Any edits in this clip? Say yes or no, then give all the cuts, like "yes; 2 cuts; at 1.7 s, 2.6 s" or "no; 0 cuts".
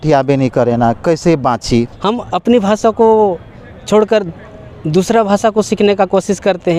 yes; 1 cut; at 1.9 s